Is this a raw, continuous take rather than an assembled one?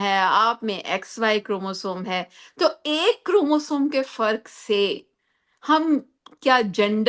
yes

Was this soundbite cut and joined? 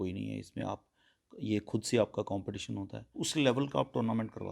yes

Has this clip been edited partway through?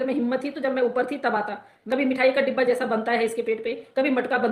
yes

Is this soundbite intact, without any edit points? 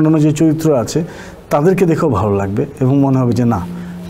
yes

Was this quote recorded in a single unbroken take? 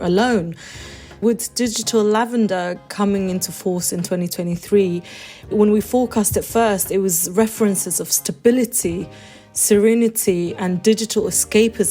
no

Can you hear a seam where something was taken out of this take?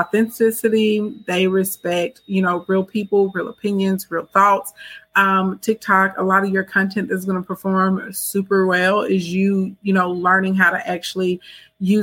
no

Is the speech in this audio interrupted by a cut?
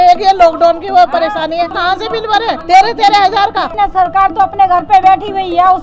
yes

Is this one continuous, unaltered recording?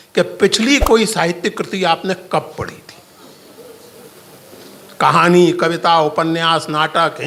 yes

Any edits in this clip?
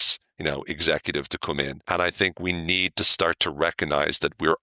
yes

